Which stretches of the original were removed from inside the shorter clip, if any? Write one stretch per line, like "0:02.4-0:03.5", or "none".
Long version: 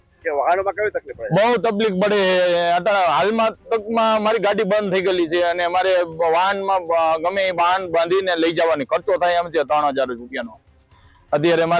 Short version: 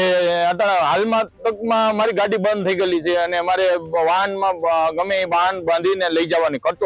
none